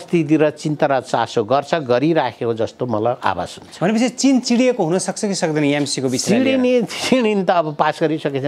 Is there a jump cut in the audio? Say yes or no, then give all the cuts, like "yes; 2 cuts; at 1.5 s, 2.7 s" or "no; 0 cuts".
no; 0 cuts